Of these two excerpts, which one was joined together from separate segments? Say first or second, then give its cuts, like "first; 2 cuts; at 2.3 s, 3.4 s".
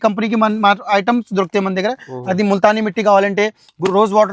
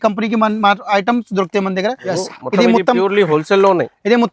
second; 1 cut; at 2.1 s